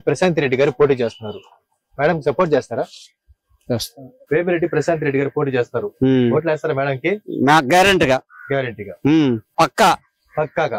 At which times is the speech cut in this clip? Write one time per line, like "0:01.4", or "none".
0:04.1
0:09.5